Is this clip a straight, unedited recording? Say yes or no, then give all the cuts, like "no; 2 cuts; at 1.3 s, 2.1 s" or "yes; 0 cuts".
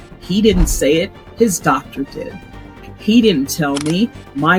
yes; 0 cuts